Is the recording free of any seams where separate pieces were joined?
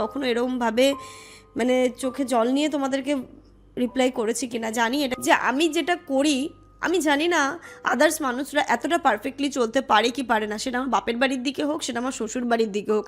no; 1 cut; at 5.1 s

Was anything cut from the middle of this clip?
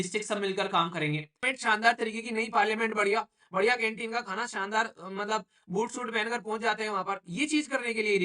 yes; 1 cut; at 1.4 s

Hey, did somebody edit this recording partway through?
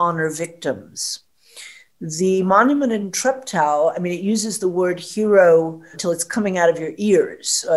yes; 2 cuts; at 3.1 s, 6.0 s

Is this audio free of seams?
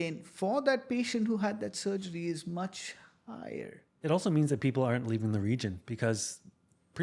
no; 1 cut; at 3.8 s

